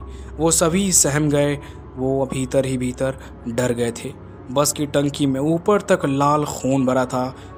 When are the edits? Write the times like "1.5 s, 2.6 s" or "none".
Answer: none